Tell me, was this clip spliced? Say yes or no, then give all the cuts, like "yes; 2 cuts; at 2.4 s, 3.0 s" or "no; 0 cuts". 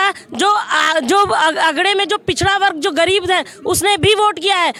no; 0 cuts